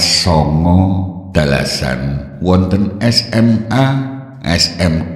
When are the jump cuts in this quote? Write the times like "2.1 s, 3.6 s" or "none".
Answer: 1.2 s, 2.2 s, 3.5 s

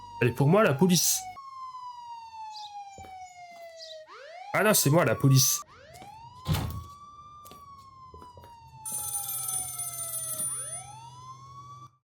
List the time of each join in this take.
none

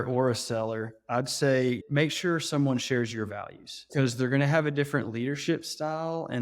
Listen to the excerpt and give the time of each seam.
1.8 s, 3.9 s

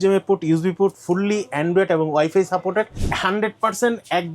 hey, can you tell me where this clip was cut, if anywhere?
3.0 s

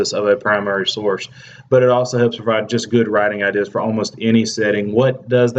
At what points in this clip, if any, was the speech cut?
1.8 s

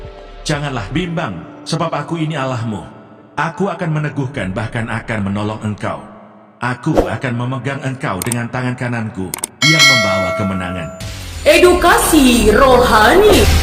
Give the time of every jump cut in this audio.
none

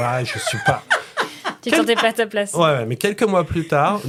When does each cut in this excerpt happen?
none

